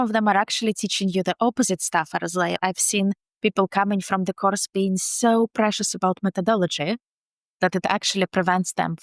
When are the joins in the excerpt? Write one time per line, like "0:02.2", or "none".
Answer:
none